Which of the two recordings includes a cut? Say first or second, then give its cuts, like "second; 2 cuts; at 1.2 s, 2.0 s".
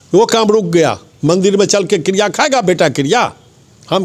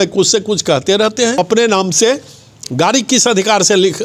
second; 1 cut; at 1.4 s